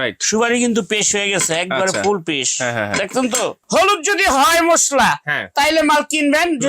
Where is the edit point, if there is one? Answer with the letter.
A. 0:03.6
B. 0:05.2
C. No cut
A